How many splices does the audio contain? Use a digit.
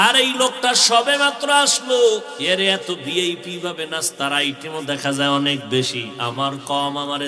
1